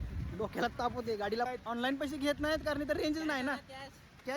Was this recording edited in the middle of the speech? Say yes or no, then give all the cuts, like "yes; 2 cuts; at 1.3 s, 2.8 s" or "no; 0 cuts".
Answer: yes; 1 cut; at 1.5 s